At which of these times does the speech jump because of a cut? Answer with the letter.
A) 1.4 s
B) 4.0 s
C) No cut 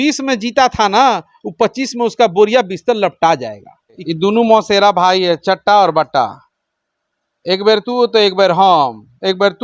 B